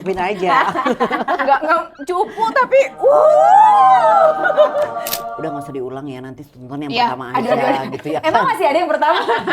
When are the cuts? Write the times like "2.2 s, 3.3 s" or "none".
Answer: 5.3 s